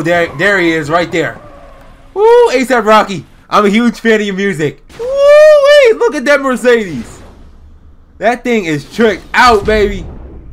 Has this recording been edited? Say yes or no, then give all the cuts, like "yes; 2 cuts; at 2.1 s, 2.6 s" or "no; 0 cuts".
yes; 1 cut; at 4.9 s